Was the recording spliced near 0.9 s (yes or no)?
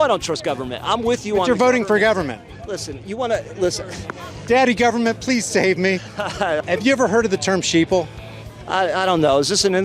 no